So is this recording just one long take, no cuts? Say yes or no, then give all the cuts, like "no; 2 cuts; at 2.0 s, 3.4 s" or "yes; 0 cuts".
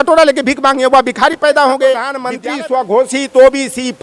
no; 1 cut; at 2.2 s